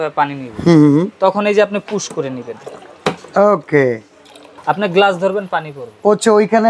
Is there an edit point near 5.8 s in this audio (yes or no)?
no